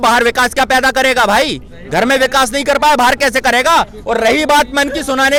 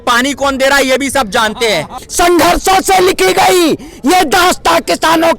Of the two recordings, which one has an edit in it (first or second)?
second